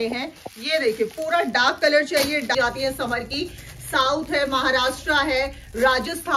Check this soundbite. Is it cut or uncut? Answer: cut